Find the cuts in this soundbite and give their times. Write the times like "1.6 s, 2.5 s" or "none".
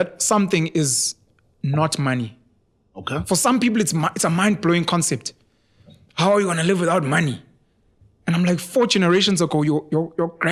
none